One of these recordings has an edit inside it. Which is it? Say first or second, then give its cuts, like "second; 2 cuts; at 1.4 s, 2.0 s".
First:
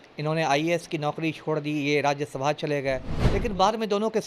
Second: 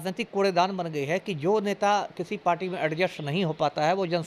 first; 1 cut; at 3.1 s